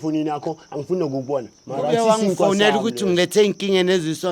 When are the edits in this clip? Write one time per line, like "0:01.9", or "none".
0:01.6